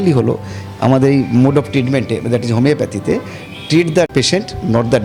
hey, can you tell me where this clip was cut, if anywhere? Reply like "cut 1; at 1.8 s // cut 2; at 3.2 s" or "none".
cut 1; at 4.1 s